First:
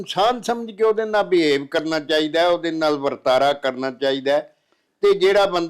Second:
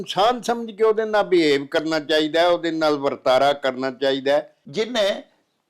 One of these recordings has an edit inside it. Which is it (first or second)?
second